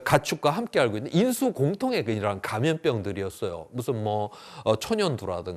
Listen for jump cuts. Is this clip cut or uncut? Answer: uncut